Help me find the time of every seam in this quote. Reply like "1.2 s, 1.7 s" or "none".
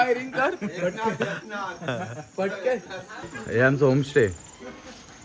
3.1 s